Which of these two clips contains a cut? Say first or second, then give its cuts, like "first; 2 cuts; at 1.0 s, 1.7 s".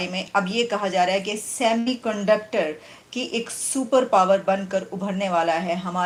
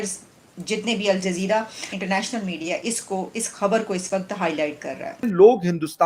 second; 2 cuts; at 1.9 s, 5.3 s